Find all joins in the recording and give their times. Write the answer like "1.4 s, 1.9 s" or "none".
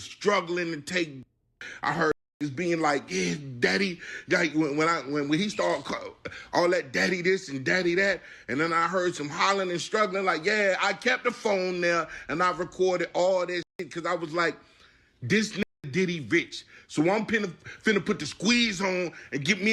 none